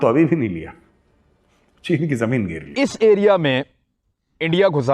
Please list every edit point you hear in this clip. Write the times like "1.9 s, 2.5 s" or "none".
2.6 s